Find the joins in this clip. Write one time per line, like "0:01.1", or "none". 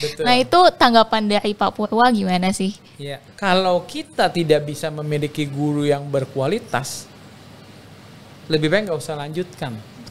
0:03.3